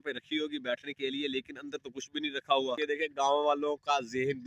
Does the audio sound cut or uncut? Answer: cut